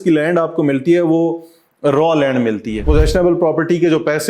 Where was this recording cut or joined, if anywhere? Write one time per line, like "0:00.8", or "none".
0:02.9